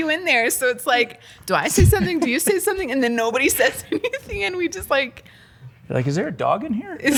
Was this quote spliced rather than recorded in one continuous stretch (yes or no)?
no